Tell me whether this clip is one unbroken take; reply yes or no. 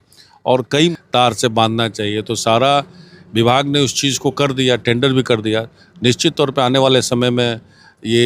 no